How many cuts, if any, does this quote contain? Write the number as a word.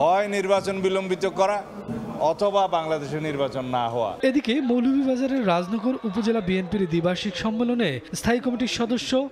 zero